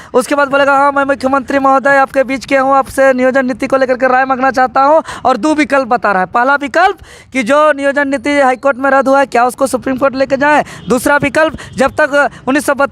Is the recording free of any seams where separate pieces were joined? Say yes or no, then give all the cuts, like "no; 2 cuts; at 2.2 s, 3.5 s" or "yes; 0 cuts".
yes; 0 cuts